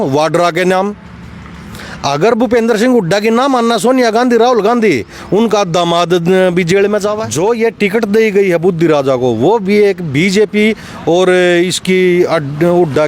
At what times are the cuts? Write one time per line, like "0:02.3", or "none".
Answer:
0:07.0